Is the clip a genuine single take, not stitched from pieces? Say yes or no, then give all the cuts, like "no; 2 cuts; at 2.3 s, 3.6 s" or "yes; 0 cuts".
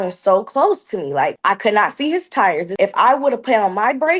no; 2 cuts; at 1.4 s, 2.7 s